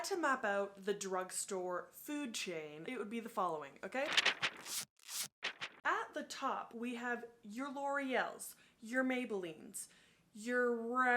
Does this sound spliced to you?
yes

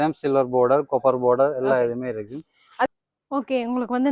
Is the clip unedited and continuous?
no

